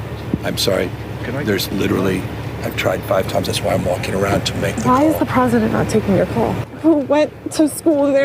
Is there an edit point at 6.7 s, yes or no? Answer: yes